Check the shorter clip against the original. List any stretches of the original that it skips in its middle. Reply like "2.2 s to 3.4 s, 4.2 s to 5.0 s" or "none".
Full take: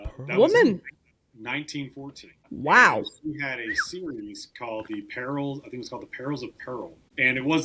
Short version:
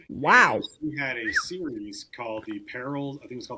none